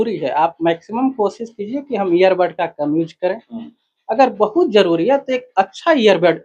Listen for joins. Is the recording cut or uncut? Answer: uncut